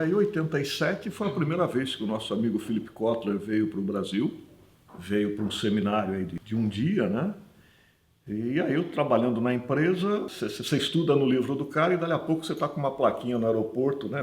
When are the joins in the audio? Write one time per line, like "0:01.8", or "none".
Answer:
0:06.4
0:10.3